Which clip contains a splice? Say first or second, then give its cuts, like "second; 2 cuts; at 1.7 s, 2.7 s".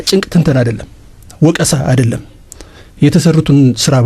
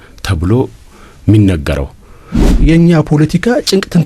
second; 1 cut; at 2.6 s